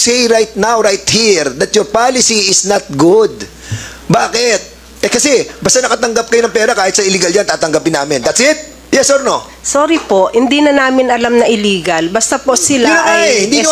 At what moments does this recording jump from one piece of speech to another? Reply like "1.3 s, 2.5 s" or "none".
8.7 s